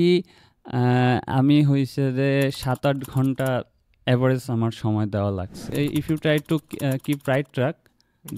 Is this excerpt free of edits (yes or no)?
no